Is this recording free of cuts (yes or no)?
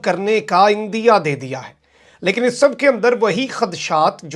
yes